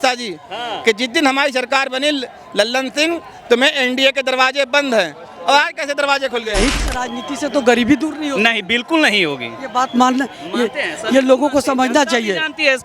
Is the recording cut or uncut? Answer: cut